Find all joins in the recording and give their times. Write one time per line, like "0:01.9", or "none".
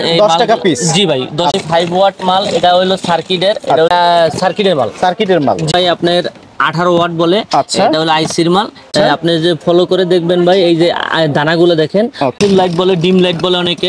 0:01.5
0:03.9
0:05.7
0:08.9
0:12.3